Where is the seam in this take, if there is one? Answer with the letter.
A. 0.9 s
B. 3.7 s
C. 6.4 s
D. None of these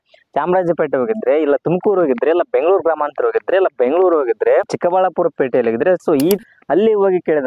C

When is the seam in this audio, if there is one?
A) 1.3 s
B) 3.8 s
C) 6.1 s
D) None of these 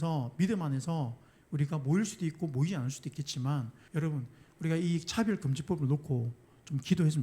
B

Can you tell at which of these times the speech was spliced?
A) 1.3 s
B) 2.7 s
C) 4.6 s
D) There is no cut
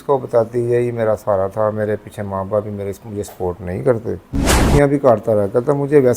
C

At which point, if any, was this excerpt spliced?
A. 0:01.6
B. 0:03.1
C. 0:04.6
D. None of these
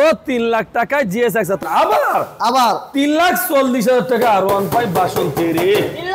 A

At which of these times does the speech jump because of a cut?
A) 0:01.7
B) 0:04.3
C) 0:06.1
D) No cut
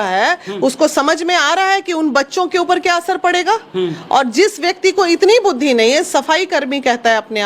D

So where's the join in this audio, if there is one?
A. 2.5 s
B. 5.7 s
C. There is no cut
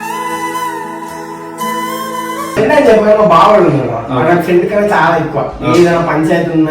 A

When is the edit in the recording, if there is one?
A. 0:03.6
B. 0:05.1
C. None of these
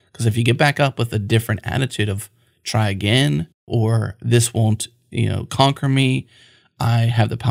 A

